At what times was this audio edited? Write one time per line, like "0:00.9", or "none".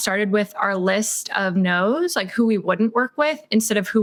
none